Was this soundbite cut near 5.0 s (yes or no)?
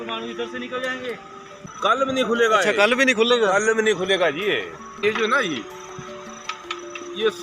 yes